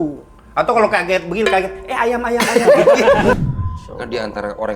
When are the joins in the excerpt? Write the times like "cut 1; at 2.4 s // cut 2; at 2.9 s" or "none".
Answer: cut 1; at 3.4 s

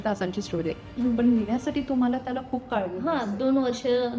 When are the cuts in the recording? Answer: none

